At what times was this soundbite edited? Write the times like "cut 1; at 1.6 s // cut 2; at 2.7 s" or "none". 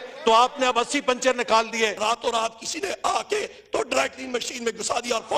cut 1; at 2.0 s